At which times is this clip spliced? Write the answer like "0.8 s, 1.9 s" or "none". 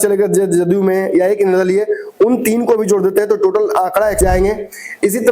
4.2 s